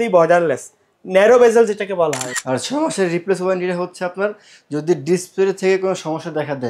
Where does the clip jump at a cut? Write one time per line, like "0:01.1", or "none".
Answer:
0:02.2